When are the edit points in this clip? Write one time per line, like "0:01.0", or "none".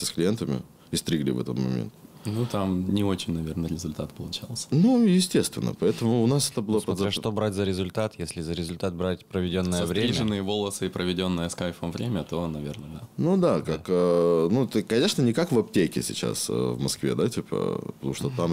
none